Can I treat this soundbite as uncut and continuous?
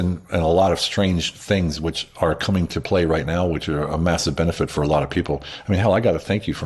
yes; 0 cuts

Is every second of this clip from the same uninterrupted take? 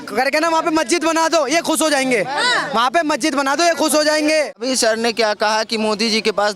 no; 1 cut; at 4.6 s

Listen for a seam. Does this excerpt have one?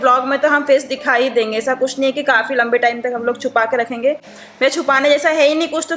no; 0 cuts

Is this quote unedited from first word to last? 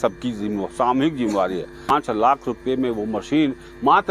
no; 1 cut; at 1.8 s

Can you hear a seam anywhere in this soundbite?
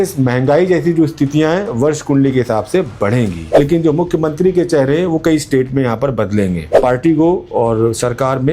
yes; 2 cuts; at 3.5 s, 6.8 s

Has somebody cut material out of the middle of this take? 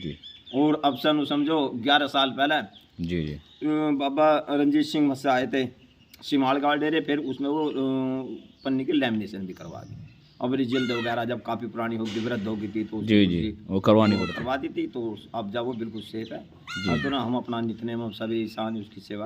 no; 0 cuts

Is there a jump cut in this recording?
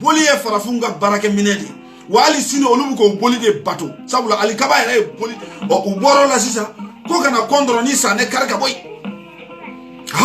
yes; 1 cut; at 5.2 s

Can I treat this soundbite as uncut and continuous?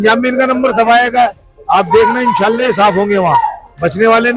yes; 0 cuts

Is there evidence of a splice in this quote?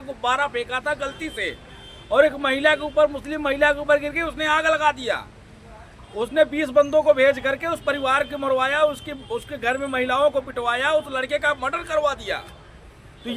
no; 0 cuts

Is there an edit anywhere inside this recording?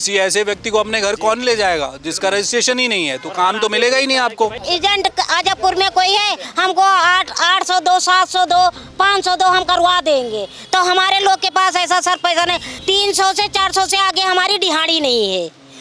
yes; 2 cuts; at 4.6 s, 12.7 s

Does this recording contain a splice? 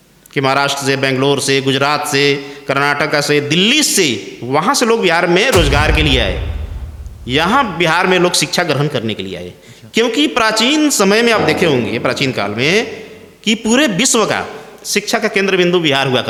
no; 0 cuts

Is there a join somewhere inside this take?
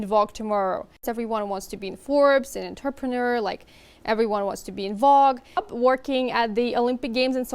yes; 2 cuts; at 1.1 s, 5.6 s

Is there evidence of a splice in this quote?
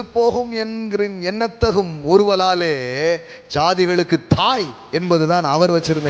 no; 0 cuts

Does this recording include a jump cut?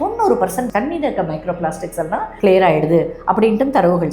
yes; 1 cut; at 2.3 s

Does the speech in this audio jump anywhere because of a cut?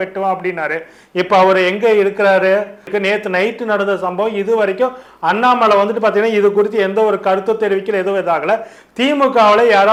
no; 0 cuts

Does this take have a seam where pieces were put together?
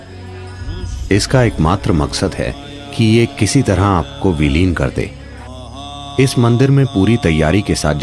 no; 0 cuts

